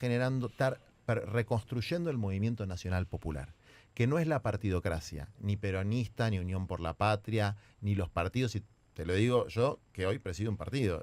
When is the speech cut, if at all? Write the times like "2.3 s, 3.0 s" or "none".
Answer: none